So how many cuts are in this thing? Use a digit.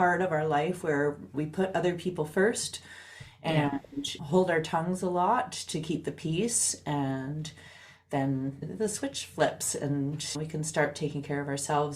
2